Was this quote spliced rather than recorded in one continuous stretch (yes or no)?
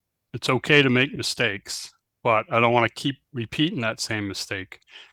no